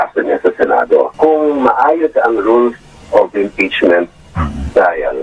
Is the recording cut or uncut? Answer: cut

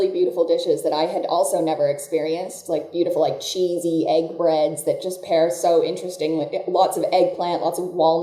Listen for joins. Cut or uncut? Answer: uncut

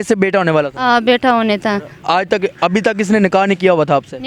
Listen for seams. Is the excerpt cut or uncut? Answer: cut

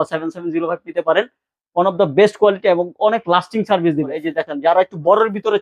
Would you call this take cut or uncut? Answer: cut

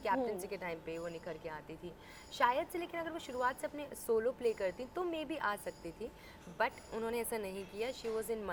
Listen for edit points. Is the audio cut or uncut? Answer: uncut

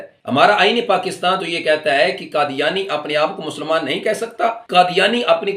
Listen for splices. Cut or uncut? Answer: cut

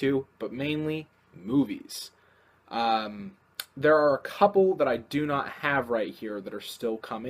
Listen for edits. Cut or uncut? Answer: uncut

